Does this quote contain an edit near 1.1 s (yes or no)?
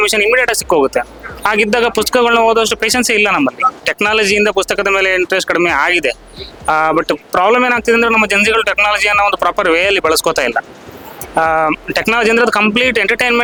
no